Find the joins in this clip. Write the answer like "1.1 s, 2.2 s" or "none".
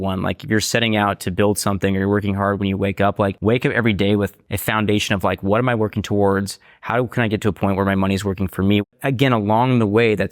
3.4 s, 4.5 s, 8.8 s